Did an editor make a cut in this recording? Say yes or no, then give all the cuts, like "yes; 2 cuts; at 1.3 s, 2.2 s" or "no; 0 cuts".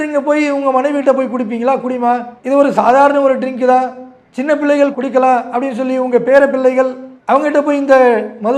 no; 0 cuts